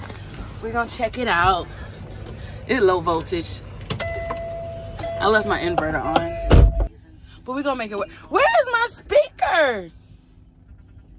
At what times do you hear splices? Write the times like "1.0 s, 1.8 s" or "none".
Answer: 6.9 s

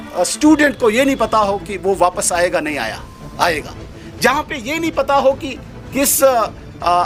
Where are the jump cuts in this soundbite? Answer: none

